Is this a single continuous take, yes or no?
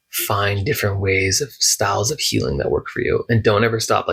yes